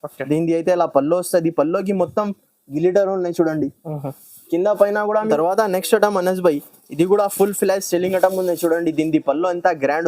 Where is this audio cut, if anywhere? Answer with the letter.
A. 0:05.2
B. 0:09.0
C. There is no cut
A